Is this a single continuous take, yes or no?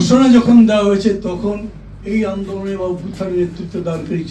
yes